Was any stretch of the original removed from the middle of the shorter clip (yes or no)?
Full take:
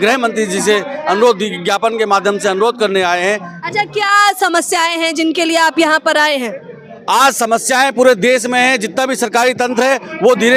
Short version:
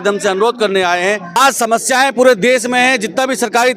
yes